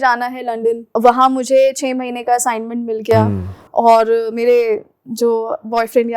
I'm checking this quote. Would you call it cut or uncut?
cut